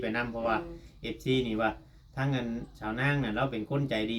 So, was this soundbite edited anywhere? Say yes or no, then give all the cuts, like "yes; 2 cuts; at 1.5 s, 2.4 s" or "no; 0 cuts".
no; 0 cuts